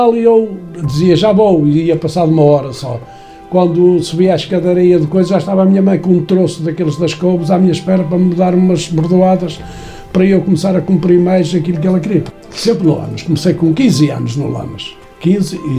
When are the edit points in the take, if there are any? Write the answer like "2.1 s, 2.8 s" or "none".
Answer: 12.3 s

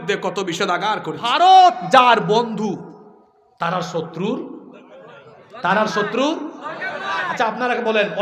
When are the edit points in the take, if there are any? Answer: 1.3 s

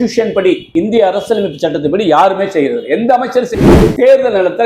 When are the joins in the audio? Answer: 3.5 s

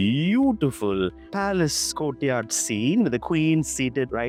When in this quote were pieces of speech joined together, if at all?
none

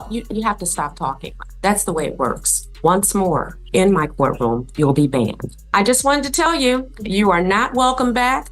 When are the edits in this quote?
2.7 s, 5.5 s

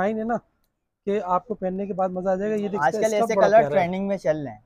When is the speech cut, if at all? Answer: 2.8 s

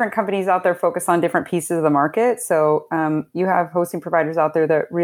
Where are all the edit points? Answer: none

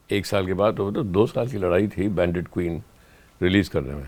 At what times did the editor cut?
none

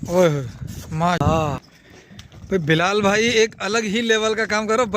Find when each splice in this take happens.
1.0 s

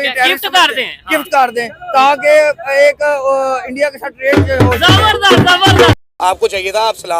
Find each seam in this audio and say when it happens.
6.0 s

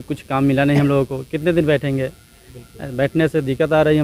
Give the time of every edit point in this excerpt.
none

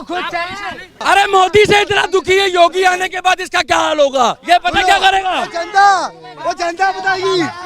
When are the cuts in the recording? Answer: 0.9 s, 4.4 s

